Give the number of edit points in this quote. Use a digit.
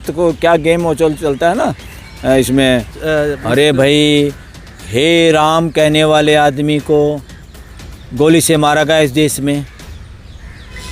1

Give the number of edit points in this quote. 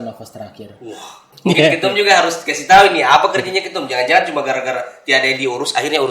1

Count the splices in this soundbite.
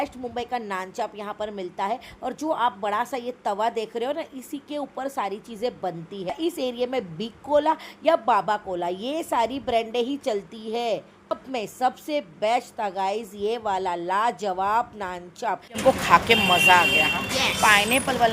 3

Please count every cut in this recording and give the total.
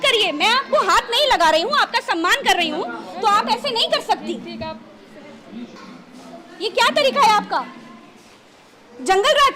1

